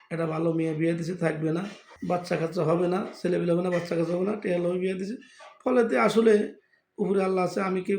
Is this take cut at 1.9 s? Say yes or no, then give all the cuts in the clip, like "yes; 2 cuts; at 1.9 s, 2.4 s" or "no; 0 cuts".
yes; 1 cut; at 1.9 s